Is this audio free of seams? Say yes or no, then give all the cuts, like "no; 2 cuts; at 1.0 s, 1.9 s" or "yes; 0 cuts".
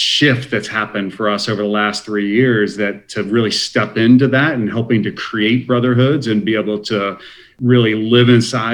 no; 1 cut; at 7.6 s